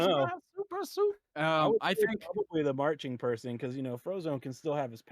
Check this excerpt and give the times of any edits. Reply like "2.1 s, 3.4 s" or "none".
1.3 s